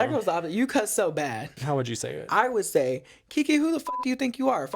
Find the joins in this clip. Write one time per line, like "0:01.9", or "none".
0:01.6